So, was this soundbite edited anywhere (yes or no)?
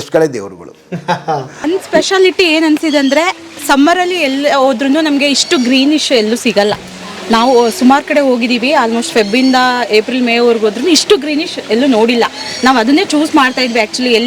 yes